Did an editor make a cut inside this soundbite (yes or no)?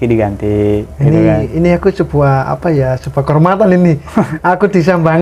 no